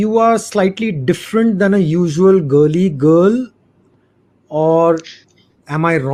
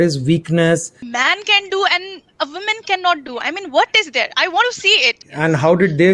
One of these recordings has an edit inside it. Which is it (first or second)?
second